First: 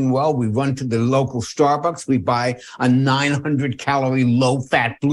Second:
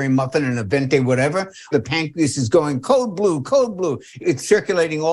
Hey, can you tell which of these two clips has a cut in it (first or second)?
second